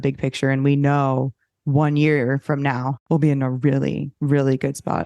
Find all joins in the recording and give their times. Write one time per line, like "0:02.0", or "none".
0:02.9
0:04.1